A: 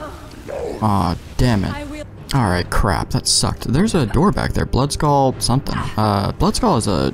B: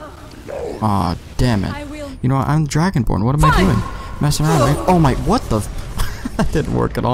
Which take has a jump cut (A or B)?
B